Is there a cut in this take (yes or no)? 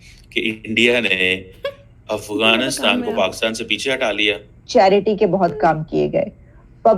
yes